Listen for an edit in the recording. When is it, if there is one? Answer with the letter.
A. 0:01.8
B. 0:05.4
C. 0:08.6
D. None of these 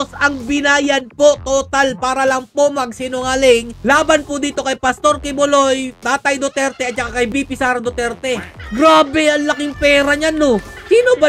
C